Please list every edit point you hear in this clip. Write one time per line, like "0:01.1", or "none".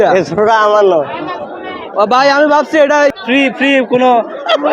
0:03.1